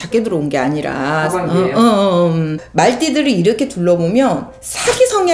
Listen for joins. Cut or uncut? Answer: cut